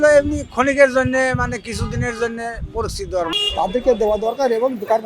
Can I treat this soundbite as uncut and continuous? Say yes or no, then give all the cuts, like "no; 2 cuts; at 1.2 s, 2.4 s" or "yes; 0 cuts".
no; 1 cut; at 3.3 s